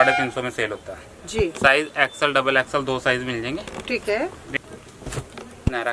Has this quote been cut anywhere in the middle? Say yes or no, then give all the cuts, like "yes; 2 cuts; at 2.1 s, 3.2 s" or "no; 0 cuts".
yes; 1 cut; at 4.5 s